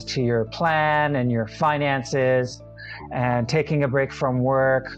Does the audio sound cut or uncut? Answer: uncut